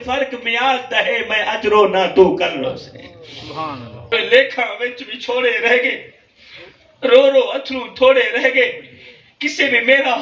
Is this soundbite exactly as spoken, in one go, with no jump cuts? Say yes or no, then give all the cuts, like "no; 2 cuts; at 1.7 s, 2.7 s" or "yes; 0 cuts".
no; 1 cut; at 4.1 s